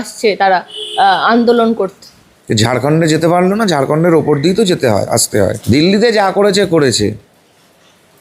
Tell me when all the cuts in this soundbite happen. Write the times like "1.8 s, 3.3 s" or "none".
5.6 s

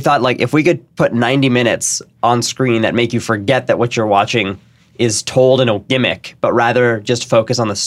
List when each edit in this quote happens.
none

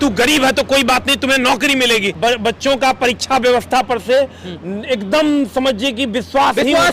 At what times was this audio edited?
2.1 s

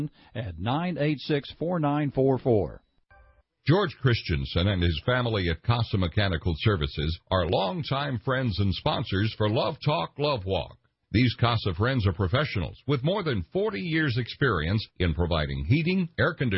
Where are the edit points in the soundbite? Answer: 2.9 s

